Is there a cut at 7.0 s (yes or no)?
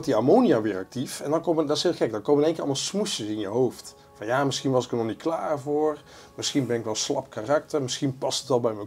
no